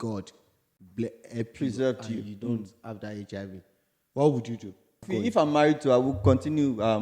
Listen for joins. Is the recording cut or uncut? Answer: cut